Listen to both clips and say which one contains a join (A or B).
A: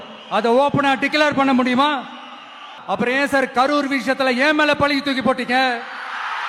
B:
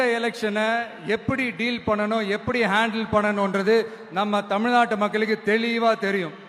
A